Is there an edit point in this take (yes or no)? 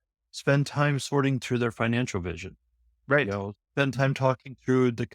no